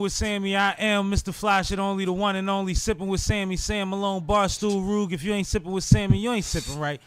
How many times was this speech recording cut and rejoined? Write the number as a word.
zero